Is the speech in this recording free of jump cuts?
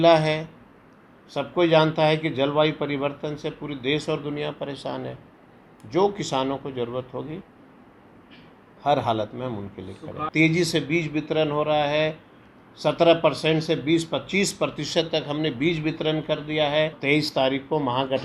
no; 2 cuts; at 10.2 s, 17.0 s

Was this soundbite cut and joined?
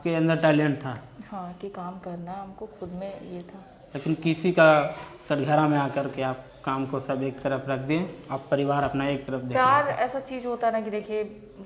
no; 0 cuts

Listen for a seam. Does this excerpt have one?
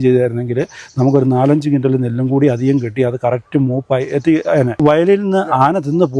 yes; 1 cut; at 4.8 s

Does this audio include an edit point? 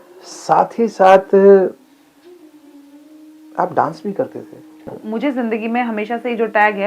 yes; 1 cut; at 4.9 s

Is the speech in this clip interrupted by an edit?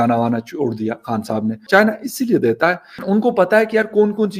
yes; 2 cuts; at 1.7 s, 3.0 s

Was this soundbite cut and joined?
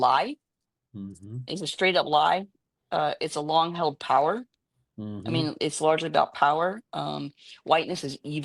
no; 0 cuts

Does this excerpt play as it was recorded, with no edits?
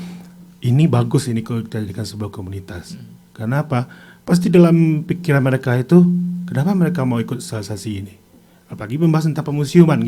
yes; 0 cuts

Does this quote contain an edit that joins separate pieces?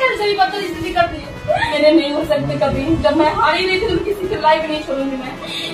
yes; 1 cut; at 1.7 s

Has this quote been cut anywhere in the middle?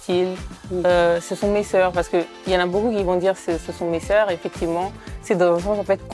no; 0 cuts

